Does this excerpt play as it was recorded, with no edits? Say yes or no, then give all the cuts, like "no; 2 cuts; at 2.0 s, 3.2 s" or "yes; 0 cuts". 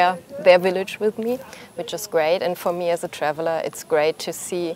yes; 0 cuts